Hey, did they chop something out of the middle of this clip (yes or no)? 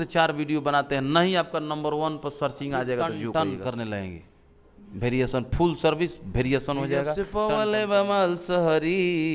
yes